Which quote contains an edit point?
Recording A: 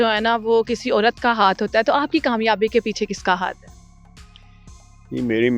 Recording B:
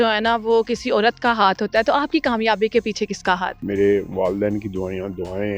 B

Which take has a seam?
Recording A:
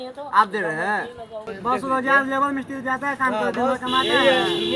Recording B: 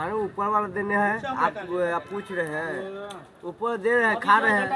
A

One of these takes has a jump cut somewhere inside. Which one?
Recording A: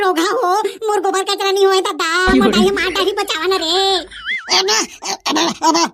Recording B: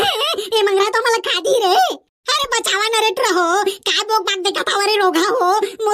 A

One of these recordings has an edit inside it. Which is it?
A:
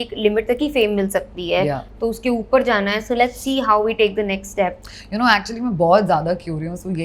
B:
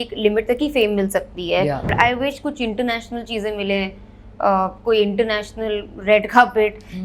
B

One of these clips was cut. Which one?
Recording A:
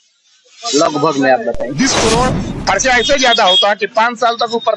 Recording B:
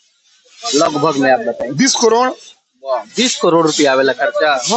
A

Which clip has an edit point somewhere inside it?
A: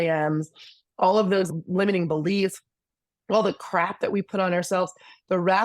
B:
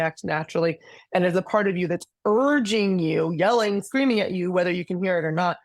A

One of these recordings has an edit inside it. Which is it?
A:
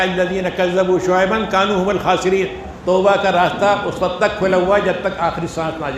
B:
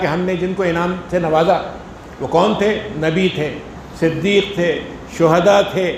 A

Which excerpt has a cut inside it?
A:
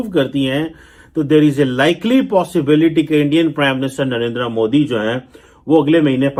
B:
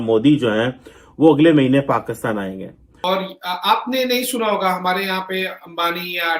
B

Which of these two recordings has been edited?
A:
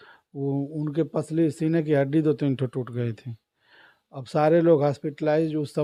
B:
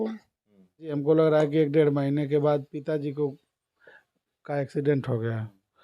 B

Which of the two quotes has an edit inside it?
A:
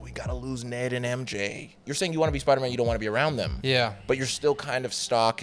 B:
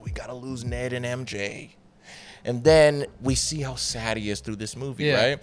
A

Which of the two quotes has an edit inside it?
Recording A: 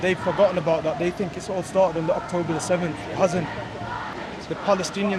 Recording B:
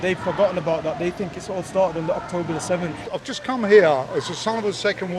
B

